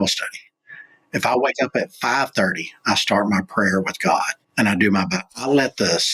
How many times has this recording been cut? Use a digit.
1